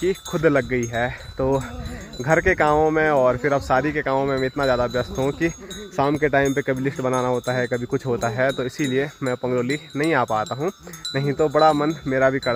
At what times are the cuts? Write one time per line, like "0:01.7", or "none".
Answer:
none